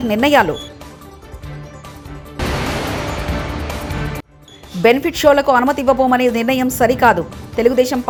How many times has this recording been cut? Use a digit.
0